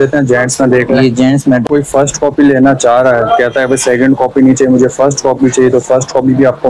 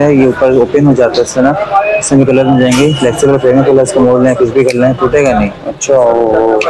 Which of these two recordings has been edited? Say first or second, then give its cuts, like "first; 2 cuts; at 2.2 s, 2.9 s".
first; 1 cut; at 1.6 s